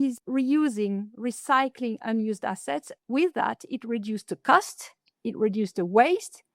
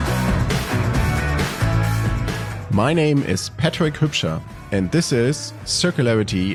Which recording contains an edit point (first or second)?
first